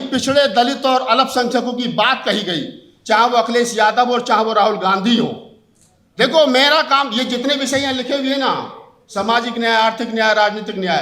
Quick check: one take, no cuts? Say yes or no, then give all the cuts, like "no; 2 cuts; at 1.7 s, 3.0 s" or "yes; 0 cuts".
yes; 0 cuts